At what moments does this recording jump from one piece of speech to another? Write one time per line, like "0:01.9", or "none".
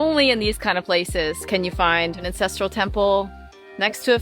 0:02.3